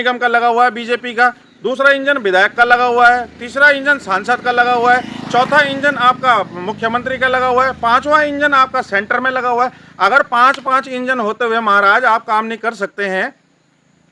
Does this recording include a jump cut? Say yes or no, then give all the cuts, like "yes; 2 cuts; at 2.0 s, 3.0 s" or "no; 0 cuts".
no; 0 cuts